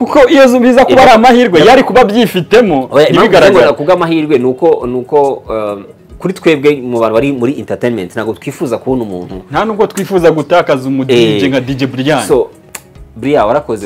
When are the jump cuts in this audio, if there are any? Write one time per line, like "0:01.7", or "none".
0:12.6